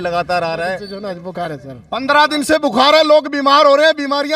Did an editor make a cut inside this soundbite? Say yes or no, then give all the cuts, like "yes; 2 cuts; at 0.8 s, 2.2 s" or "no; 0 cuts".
yes; 1 cut; at 1.3 s